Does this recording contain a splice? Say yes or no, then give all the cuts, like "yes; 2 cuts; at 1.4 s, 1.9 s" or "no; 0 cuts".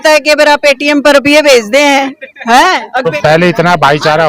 yes; 1 cut; at 3.1 s